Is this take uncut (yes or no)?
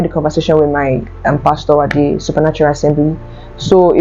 yes